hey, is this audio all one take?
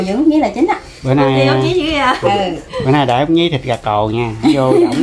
yes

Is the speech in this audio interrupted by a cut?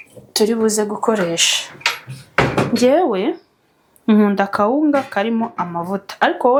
no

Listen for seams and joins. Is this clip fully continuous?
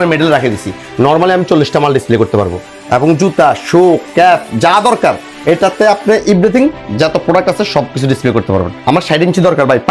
no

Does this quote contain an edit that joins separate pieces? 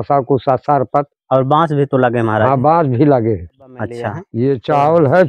yes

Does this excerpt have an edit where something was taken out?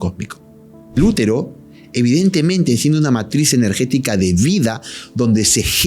yes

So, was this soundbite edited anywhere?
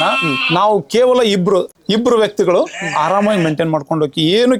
no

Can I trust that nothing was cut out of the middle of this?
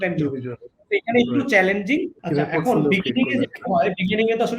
no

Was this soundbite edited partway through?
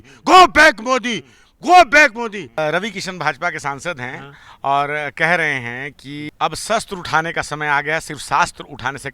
yes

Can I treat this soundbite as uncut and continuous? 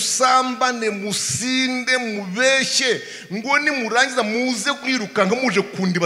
yes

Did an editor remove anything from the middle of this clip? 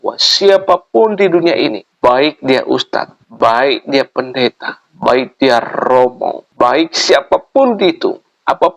yes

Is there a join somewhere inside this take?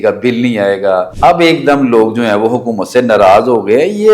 yes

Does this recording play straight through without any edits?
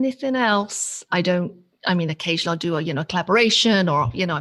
no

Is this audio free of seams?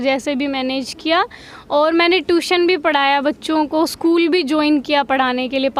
yes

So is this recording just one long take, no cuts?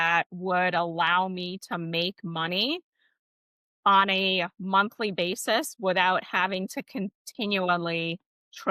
yes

